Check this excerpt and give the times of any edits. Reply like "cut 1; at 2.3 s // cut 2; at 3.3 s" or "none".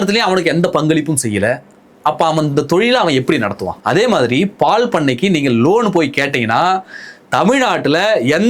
cut 1; at 3.7 s